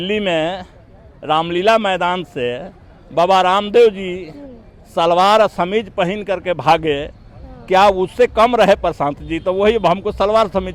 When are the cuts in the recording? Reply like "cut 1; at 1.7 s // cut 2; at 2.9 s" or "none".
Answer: none